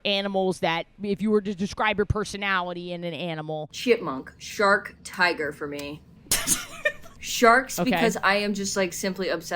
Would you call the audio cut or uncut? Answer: cut